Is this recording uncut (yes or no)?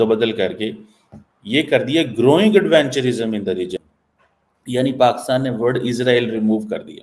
no